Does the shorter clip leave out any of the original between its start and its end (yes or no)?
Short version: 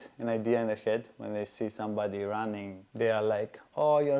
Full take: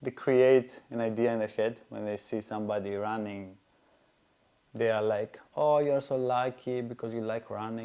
yes